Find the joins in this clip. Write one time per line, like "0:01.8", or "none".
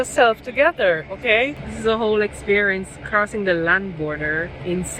0:01.6